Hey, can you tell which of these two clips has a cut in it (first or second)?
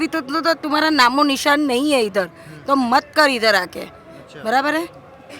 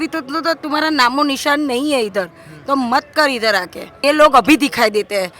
second